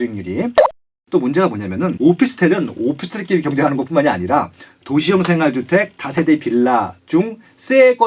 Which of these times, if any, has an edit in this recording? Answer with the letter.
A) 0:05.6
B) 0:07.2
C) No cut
C